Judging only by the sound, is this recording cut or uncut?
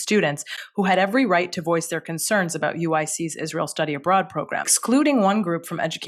cut